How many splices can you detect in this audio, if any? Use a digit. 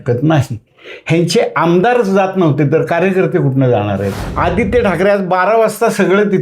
1